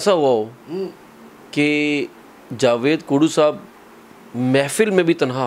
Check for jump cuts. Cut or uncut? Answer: uncut